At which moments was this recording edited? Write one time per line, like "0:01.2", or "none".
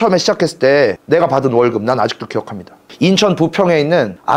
none